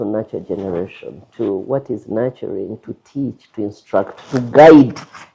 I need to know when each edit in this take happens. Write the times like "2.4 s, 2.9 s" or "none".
none